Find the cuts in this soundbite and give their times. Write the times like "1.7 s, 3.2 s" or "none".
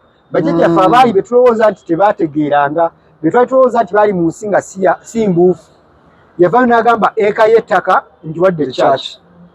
none